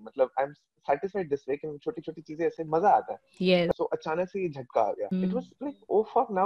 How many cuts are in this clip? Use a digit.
2